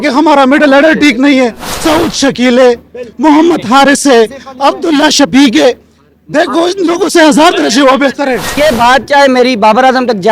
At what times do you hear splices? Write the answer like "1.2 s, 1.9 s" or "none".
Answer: 1.7 s, 8.5 s